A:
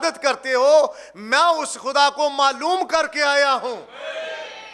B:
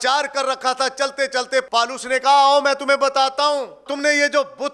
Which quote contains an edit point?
B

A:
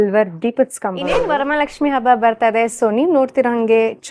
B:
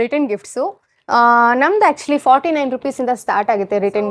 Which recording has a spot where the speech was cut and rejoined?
A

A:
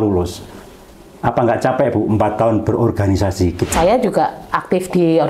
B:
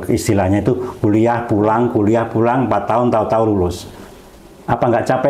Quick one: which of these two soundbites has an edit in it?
A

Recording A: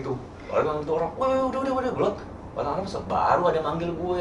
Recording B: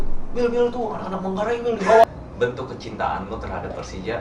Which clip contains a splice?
B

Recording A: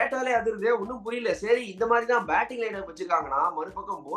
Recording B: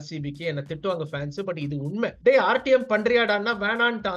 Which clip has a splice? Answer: B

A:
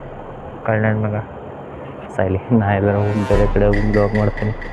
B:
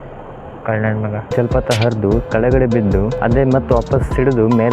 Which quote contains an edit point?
B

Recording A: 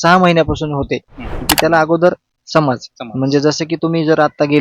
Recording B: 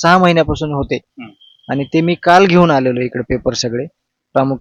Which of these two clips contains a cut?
A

